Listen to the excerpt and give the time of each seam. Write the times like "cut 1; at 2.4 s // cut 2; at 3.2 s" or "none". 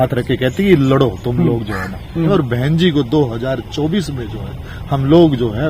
cut 1; at 2.3 s